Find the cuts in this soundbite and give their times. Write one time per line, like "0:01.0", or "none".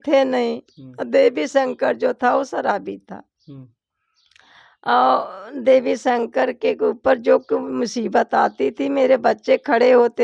none